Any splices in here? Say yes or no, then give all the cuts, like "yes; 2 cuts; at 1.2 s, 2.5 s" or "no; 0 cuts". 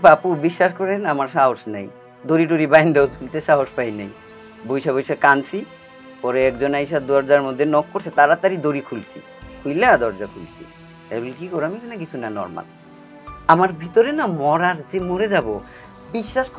no; 0 cuts